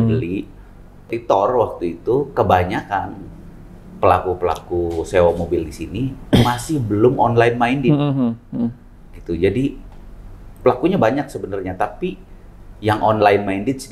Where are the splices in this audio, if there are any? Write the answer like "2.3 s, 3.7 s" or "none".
1.1 s